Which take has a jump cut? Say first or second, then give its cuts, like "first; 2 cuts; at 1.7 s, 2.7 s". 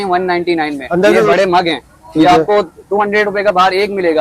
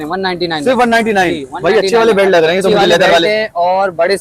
first; 1 cut; at 1.3 s